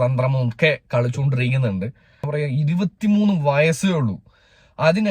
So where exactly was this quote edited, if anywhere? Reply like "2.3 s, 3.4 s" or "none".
2.3 s